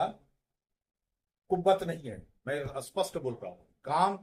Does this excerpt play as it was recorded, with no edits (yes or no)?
yes